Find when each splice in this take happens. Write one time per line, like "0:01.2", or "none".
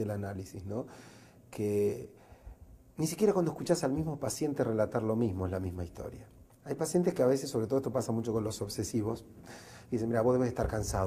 0:07.2